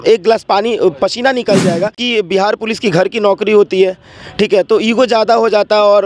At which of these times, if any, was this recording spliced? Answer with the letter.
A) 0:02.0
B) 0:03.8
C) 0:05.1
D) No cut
A